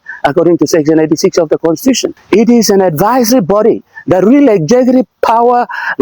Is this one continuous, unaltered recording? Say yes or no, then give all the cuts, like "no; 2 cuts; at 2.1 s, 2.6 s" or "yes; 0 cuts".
no; 1 cut; at 2.1 s